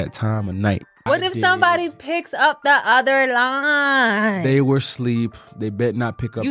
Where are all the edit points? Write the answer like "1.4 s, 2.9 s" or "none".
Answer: 0.9 s